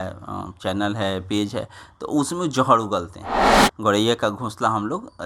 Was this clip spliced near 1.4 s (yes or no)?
no